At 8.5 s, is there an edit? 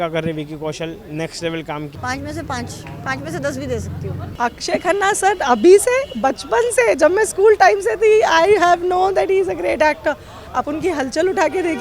no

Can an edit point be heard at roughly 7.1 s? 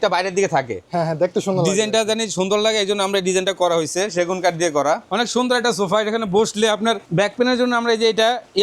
yes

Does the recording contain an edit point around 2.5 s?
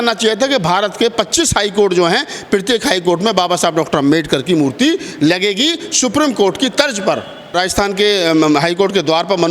no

